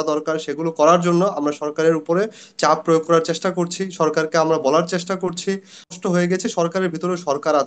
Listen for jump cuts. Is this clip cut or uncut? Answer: cut